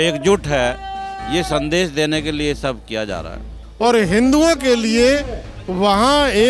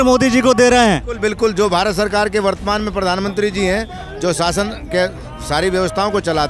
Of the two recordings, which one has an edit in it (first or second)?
first